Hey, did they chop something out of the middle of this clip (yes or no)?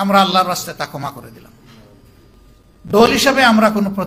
yes